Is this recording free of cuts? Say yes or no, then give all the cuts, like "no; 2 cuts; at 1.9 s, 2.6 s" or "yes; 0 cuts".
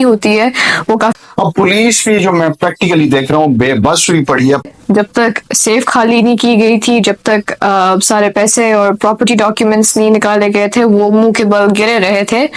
no; 2 cuts; at 1.1 s, 4.7 s